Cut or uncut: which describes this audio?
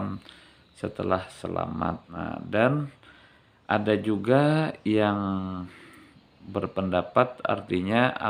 cut